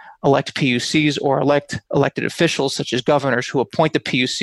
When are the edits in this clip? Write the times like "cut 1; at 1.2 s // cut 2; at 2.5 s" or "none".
none